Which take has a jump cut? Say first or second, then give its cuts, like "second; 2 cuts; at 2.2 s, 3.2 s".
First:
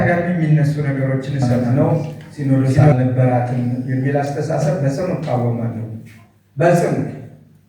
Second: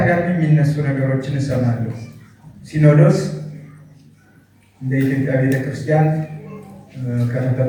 first; 1 cut; at 1.7 s